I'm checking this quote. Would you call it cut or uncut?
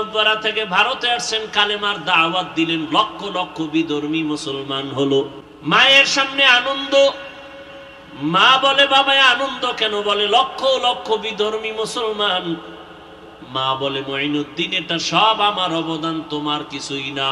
cut